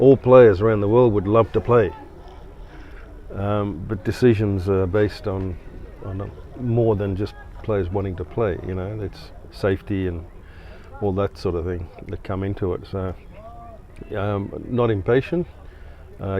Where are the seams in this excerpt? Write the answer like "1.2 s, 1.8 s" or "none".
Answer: none